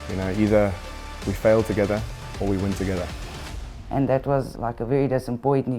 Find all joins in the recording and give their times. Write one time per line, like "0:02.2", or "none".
0:03.2
0:04.5